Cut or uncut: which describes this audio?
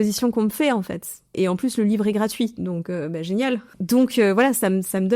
cut